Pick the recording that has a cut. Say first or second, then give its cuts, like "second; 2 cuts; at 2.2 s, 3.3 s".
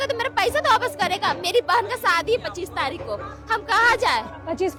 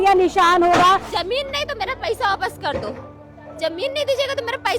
second; 1 cut; at 1.1 s